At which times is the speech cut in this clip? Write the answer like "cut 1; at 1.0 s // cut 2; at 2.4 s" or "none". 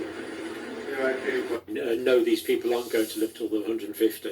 cut 1; at 1.6 s